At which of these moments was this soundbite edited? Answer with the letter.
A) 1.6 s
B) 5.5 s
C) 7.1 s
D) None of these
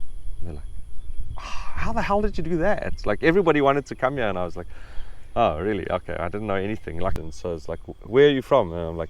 C